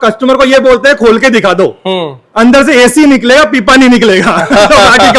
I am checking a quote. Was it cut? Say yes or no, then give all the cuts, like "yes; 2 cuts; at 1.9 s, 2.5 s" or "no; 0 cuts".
no; 0 cuts